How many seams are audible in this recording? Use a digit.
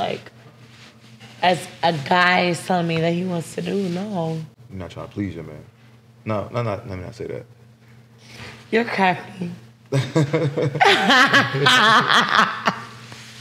1